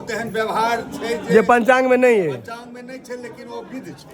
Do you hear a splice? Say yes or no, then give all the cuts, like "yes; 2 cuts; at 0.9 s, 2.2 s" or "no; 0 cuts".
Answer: no; 0 cuts